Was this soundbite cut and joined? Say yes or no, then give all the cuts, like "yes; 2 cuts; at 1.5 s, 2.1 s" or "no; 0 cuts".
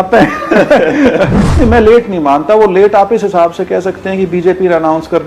yes; 1 cut; at 1.4 s